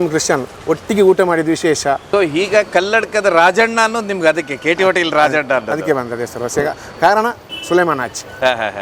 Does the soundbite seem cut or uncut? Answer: cut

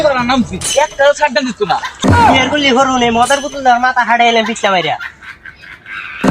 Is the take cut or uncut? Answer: cut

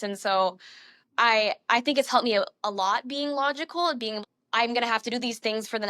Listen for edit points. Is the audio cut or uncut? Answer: cut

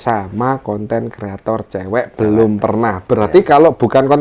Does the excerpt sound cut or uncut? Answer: uncut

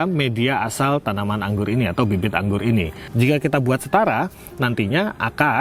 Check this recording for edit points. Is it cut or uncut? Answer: cut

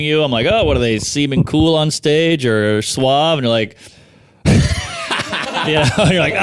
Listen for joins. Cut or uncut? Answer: uncut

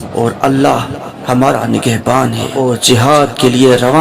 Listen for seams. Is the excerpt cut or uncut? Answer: cut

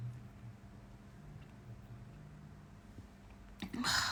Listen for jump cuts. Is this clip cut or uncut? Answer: uncut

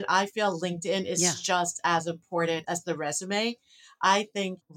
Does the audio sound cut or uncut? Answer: uncut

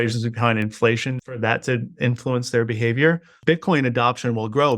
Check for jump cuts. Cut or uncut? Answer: cut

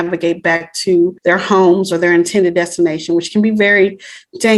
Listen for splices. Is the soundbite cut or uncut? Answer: cut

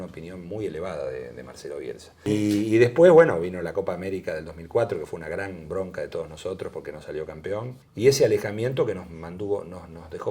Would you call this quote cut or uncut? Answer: cut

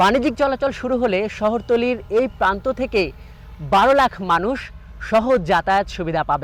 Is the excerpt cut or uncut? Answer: uncut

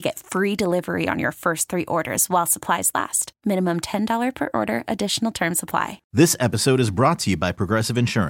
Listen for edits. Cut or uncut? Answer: cut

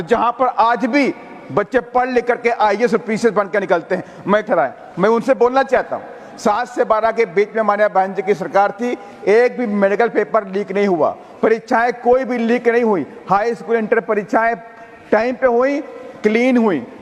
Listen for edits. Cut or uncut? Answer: cut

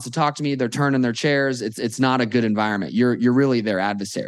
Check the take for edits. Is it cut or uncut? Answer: uncut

